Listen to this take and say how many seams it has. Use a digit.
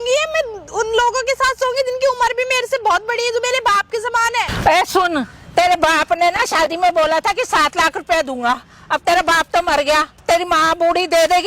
2